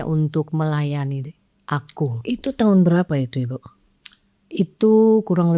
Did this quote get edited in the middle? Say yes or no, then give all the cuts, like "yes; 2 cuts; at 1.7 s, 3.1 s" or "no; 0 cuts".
no; 0 cuts